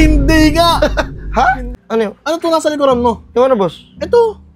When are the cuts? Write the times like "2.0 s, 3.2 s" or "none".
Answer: 1.7 s

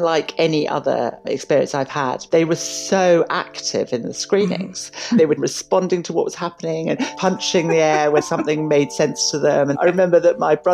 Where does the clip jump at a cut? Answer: 2.2 s, 5.3 s, 7.2 s, 8.2 s, 9.7 s

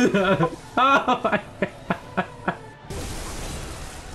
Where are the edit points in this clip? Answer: 2.5 s

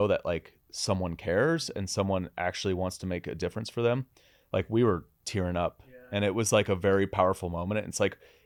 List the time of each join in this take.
none

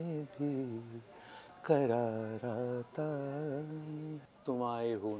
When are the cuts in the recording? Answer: 4.2 s

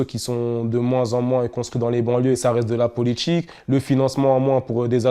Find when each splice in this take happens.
2.4 s

